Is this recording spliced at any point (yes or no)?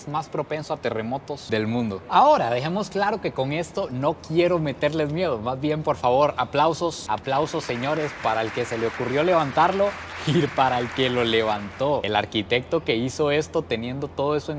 no